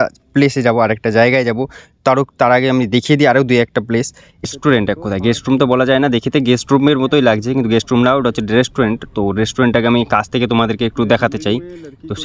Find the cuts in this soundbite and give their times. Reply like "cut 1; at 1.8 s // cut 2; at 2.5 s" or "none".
cut 1; at 4.4 s